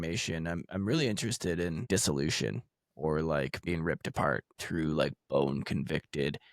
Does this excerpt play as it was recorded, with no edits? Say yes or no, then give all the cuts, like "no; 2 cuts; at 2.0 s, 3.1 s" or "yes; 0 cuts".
no; 3 cuts; at 1.9 s, 3.7 s, 4.5 s